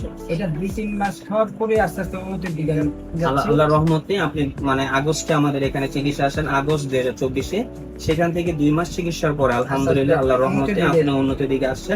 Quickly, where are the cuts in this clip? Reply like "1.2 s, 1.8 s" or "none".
none